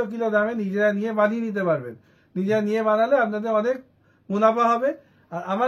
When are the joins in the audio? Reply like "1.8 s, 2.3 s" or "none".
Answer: none

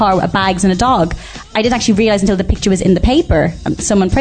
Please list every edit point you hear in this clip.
1.5 s

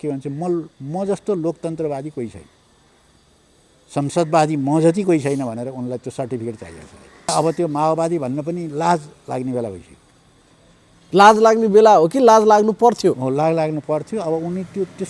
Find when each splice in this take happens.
7.3 s

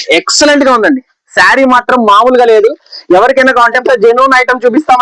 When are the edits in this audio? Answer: 3.8 s

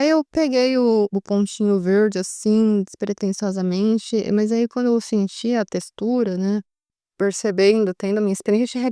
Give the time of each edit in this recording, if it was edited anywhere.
1.2 s, 7.0 s

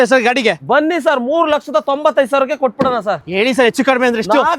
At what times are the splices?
3.2 s

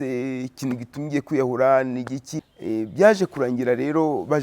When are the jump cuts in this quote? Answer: 2.2 s

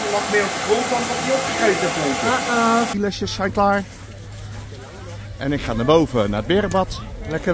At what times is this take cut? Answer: 2.9 s

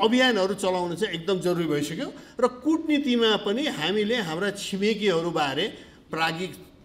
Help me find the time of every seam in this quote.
none

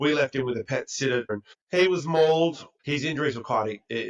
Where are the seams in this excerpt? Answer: 1.4 s, 2.7 s

